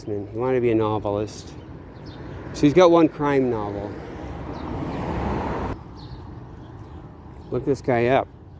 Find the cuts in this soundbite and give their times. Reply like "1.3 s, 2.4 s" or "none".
5.7 s